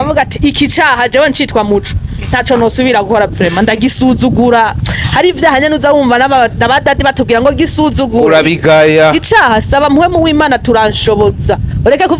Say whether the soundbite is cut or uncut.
uncut